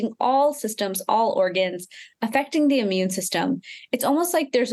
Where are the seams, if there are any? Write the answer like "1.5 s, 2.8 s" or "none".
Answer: none